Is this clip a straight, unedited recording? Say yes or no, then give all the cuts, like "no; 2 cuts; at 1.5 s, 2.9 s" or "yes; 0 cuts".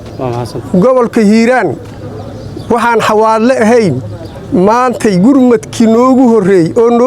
yes; 0 cuts